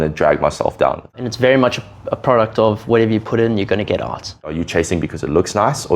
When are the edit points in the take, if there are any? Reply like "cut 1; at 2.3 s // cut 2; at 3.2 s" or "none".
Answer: cut 1; at 1.2 s // cut 2; at 4.5 s